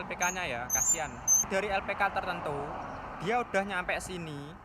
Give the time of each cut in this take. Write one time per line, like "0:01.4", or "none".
0:01.5